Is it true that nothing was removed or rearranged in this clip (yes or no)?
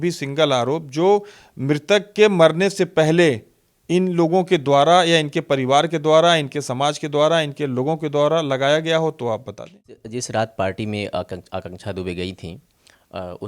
no